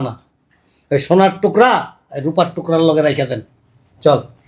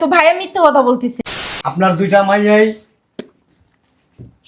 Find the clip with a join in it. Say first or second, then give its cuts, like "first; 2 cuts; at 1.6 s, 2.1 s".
second; 1 cut; at 1.2 s